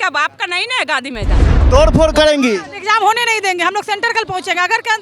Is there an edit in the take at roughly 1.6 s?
yes; 1 cut; at 1.6 s

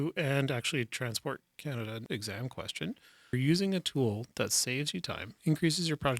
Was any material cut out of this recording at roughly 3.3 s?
yes; 2 cuts; at 2.0 s, 3.3 s

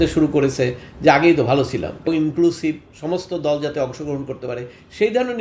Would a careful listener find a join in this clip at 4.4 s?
no; 1 cut; at 2.1 s

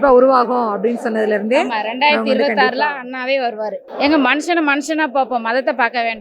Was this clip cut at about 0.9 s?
no; 1 cut; at 3.8 s

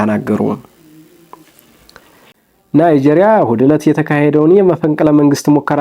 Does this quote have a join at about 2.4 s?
yes; 1 cut; at 2.4 s

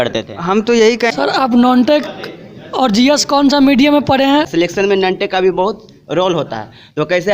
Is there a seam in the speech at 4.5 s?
yes; 2 cuts; at 1.1 s, 4.5 s

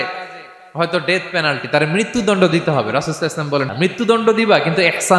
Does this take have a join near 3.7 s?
yes; 1 cut; at 3.7 s

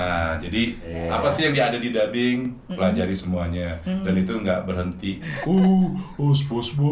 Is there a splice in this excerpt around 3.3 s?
no; 2 cuts; at 0.9 s, 5.3 s

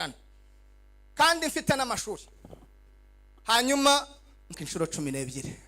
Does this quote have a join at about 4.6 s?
yes; 1 cut; at 4.6 s

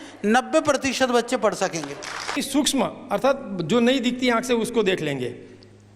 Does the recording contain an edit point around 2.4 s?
yes; 1 cut; at 2.4 s

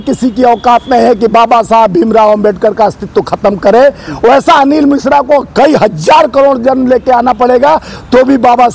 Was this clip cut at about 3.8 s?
no; 0 cuts

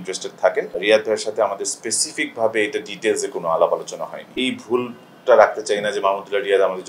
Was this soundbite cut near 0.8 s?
yes; 2 cuts; at 0.8 s, 4.3 s

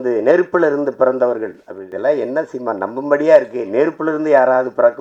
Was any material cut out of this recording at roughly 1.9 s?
yes; 1 cut; at 1.9 s

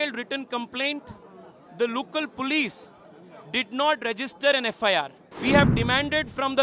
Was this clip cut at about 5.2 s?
yes; 1 cut; at 5.2 s

